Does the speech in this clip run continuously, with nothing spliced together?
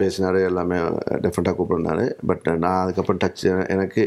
yes; 0 cuts

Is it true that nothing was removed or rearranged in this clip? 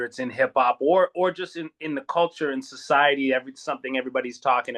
yes; 0 cuts

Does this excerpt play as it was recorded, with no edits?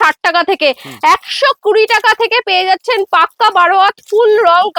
yes; 0 cuts

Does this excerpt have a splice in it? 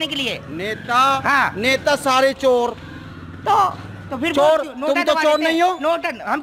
no; 0 cuts

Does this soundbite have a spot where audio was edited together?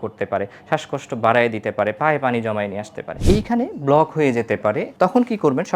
yes; 2 cuts; at 3.2 s, 4.9 s

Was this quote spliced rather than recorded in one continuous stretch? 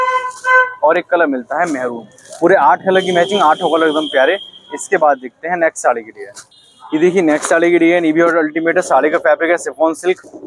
no; 0 cuts

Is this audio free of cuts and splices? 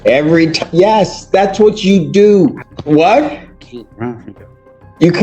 no; 1 cut; at 2.7 s

